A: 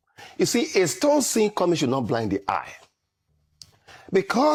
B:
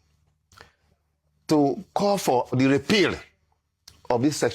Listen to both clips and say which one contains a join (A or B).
B